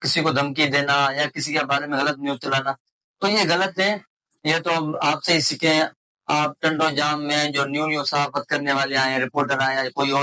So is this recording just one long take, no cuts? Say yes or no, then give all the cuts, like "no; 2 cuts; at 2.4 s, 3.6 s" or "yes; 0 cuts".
yes; 0 cuts